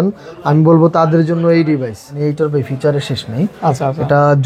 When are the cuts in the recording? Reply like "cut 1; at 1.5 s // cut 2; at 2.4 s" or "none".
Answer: cut 1; at 2.1 s